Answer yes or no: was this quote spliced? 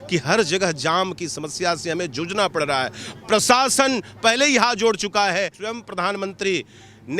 yes